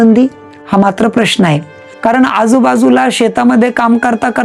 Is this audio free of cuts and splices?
yes; 0 cuts

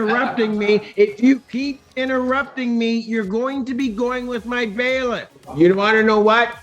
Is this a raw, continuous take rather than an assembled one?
no; 1 cut; at 5.4 s

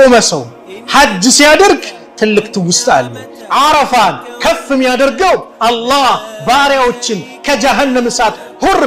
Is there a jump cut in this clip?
yes; 1 cut; at 3.3 s

